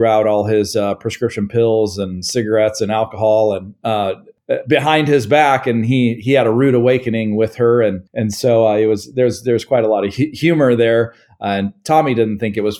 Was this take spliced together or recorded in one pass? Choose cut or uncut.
cut